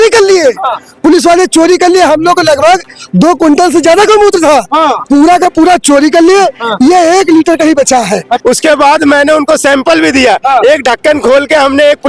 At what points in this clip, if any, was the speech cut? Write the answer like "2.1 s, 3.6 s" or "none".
8.4 s